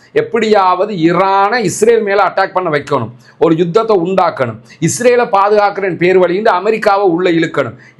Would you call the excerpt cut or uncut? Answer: uncut